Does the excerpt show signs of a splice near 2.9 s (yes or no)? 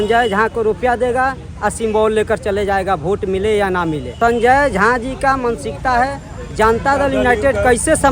no